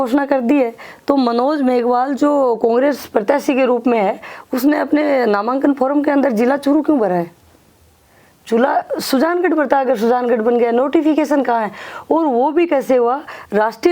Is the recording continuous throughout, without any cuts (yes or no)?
yes